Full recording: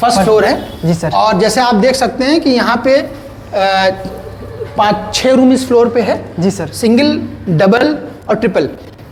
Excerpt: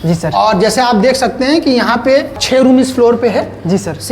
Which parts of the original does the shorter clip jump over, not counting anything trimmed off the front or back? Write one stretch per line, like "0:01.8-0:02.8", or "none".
0:03.2-0:05.1